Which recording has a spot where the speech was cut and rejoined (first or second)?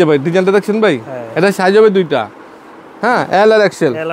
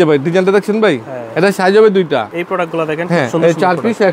second